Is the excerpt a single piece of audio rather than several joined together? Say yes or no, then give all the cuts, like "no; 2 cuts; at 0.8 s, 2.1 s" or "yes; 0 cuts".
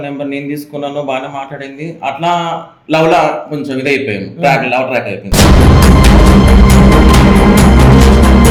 yes; 0 cuts